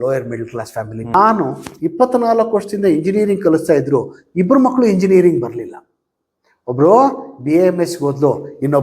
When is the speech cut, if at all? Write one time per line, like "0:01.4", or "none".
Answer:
0:01.1